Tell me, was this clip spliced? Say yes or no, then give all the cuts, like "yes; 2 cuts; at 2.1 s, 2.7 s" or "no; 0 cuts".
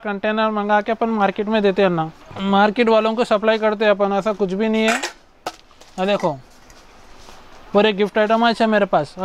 no; 0 cuts